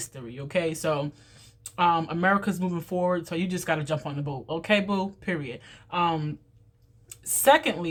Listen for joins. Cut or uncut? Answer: uncut